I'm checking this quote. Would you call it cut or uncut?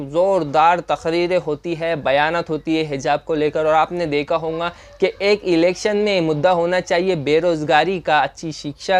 uncut